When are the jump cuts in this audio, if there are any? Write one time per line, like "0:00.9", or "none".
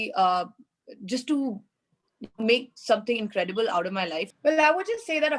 0:04.3